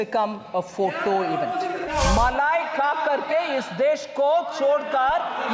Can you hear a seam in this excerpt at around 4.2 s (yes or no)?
no